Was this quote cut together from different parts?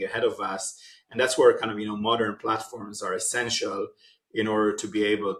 no; 0 cuts

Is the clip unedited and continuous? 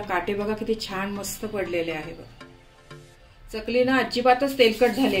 yes; 0 cuts

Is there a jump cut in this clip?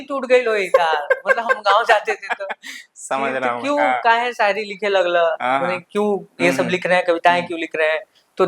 no; 0 cuts

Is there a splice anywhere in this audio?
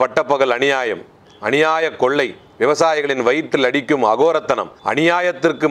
no; 0 cuts

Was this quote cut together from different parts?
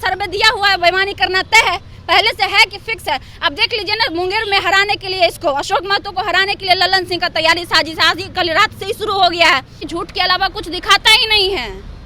yes; 1 cut; at 9.8 s

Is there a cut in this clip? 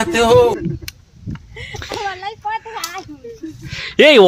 no; 0 cuts

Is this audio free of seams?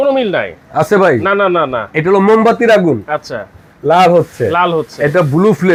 yes; 0 cuts

